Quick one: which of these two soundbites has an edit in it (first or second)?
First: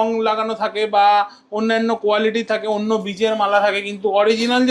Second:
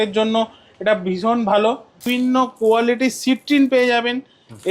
second